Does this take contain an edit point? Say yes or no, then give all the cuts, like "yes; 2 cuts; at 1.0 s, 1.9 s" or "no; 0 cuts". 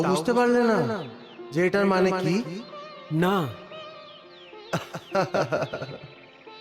no; 0 cuts